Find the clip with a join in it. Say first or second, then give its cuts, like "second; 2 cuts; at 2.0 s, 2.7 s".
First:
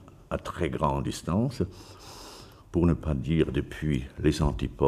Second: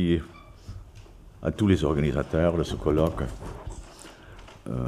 first; 1 cut; at 1.3 s